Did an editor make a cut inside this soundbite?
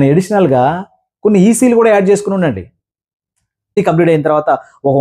yes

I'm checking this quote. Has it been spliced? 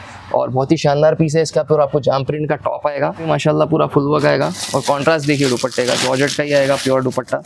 yes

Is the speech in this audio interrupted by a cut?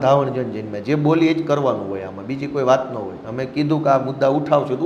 no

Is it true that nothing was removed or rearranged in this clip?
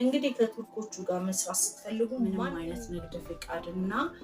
no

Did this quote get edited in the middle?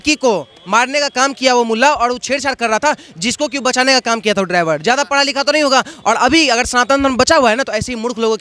no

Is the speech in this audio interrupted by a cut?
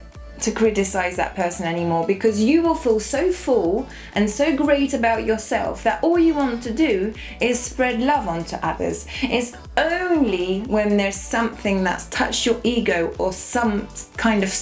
no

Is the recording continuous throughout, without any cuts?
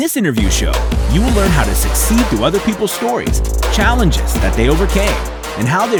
yes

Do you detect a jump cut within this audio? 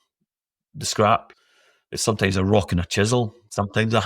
yes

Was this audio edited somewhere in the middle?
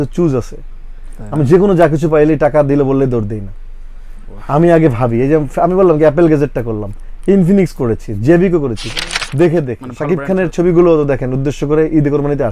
yes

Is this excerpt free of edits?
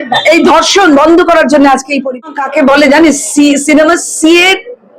no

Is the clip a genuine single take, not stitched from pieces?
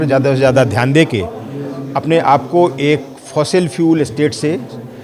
yes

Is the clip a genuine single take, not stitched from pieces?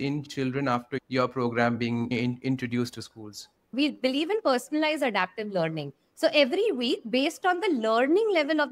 no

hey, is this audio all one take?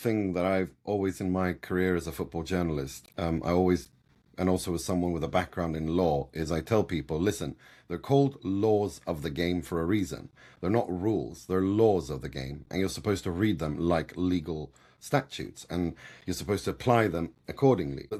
yes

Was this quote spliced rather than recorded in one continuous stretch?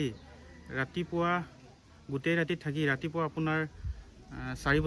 no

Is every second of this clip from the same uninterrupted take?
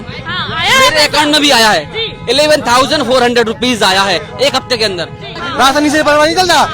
no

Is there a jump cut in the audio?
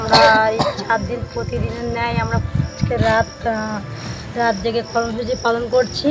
no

